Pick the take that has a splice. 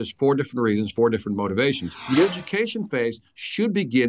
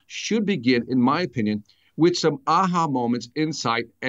first; 1 cut; at 1.9 s

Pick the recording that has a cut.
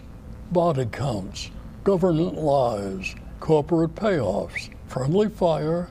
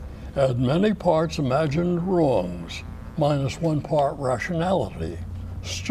second; 1 cut; at 1.0 s

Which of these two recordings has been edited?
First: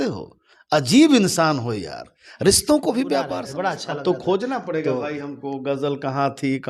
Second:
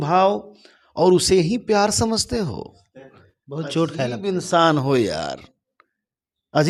first; 1 cut; at 3.4 s

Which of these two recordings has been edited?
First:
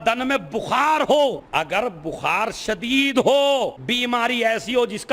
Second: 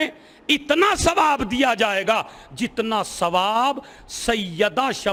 first; 1 cut; at 1.4 s

